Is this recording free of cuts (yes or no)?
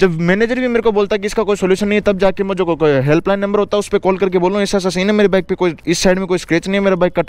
yes